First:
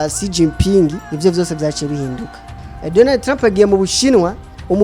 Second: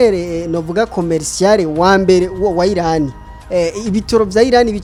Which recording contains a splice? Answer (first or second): first